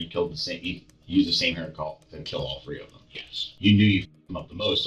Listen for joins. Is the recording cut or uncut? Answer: cut